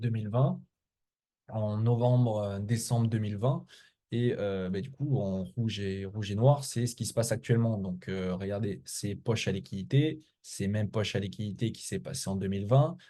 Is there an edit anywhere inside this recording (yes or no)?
no